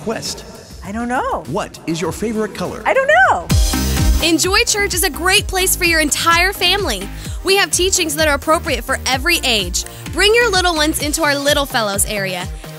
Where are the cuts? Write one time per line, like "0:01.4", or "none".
0:03.4